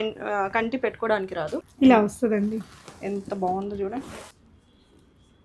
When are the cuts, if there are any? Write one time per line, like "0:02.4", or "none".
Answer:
0:01.6
0:04.3